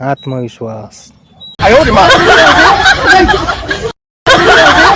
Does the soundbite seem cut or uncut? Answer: cut